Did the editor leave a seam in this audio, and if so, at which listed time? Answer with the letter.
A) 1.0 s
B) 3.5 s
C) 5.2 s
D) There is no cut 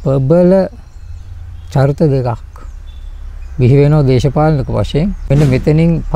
C